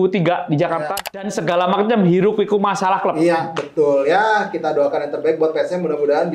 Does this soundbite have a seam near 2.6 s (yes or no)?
no